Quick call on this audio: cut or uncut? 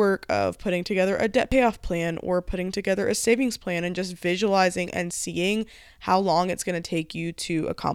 uncut